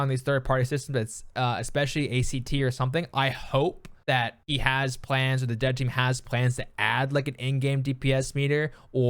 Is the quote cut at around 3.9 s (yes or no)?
yes